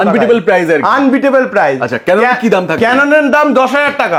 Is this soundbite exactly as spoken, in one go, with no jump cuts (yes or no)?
yes